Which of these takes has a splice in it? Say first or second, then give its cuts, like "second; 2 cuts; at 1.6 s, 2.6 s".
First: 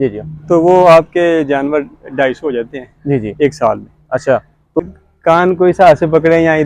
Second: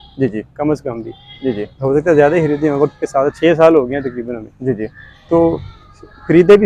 first; 1 cut; at 4.9 s